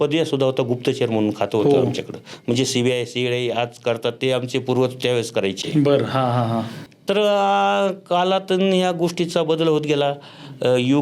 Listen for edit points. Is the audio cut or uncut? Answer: uncut